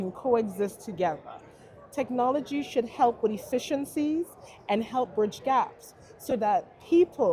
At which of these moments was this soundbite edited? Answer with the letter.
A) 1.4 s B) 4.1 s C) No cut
C